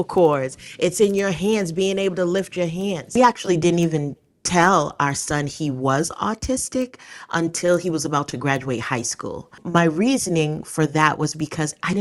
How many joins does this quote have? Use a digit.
2